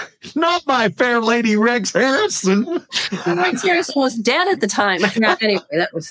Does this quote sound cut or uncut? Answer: cut